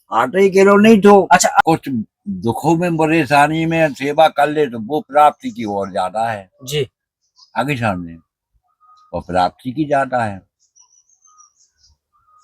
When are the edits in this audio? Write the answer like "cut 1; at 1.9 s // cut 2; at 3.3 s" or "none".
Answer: cut 1; at 1.6 s